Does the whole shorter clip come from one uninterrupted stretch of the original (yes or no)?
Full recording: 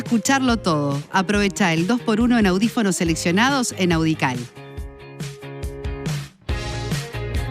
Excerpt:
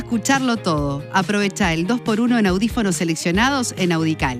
yes